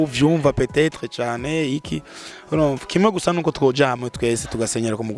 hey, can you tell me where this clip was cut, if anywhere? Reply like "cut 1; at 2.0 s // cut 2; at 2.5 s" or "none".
none